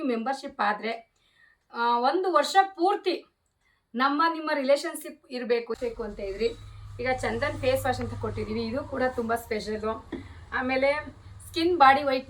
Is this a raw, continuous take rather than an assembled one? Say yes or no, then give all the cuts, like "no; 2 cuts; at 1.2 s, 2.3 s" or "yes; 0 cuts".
no; 1 cut; at 5.7 s